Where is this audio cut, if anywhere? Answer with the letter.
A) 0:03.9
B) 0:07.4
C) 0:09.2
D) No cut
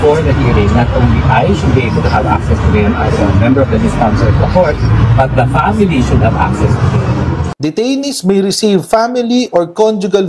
B